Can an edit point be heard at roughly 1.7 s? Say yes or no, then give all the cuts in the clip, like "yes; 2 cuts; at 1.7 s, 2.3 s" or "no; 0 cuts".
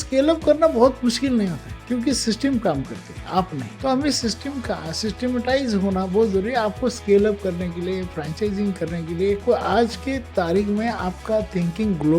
no; 1 cut; at 9.4 s